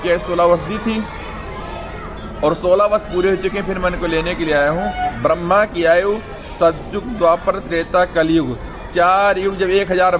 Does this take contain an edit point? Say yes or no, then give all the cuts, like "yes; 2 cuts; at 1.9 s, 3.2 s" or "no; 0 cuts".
yes; 1 cut; at 5.1 s